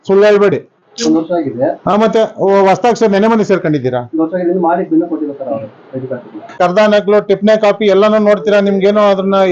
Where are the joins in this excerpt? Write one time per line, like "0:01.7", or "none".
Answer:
0:06.6